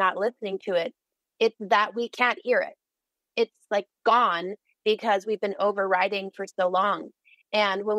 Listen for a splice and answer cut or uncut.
uncut